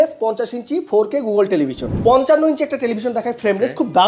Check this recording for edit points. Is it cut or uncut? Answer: cut